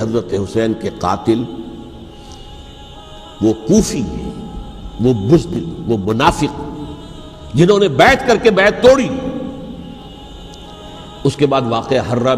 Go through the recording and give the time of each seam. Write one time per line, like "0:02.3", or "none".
0:10.1